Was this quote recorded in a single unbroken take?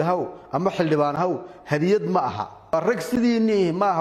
no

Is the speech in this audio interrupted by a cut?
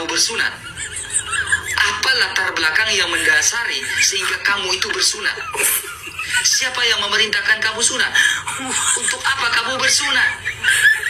no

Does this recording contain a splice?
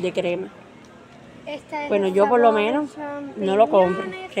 no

